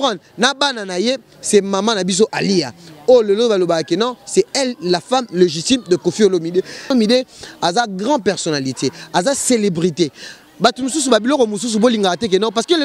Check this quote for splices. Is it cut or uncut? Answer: cut